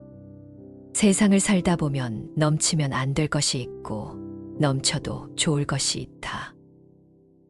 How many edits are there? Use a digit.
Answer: 1